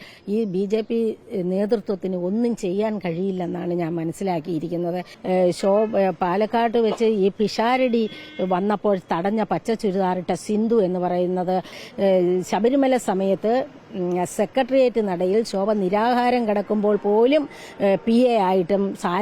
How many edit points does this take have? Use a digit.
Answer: 2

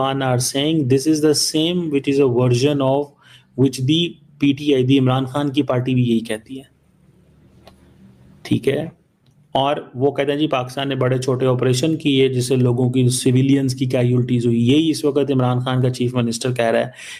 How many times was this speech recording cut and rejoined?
0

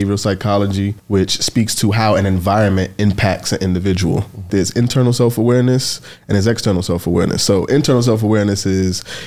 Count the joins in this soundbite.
2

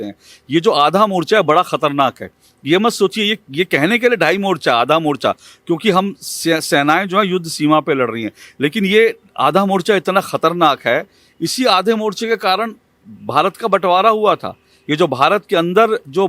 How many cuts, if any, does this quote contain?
0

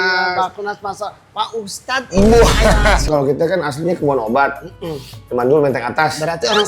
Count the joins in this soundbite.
1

